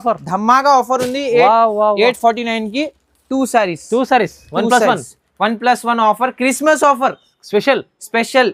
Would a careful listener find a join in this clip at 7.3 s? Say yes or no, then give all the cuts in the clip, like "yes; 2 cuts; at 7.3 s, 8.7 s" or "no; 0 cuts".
no; 0 cuts